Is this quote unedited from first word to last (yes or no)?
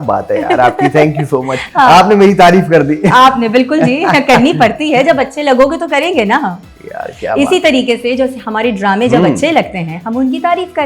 yes